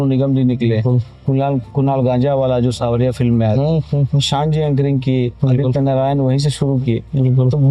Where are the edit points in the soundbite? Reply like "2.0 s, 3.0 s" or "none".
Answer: none